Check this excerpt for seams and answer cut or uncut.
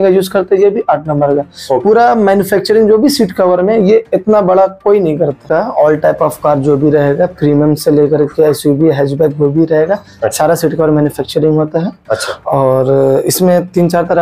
cut